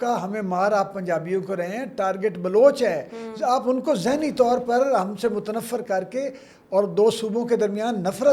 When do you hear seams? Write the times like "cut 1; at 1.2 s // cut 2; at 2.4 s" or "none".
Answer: none